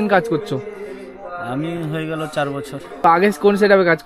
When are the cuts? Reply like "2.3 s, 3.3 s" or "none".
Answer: 3.0 s